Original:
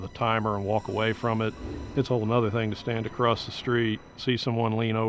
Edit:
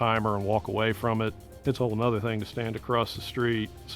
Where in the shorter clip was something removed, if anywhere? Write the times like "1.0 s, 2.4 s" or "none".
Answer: 1.5 s